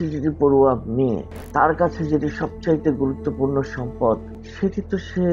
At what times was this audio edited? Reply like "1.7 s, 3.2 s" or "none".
1.3 s, 4.4 s